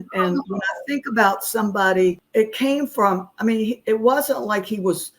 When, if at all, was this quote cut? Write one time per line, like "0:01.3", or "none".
0:02.2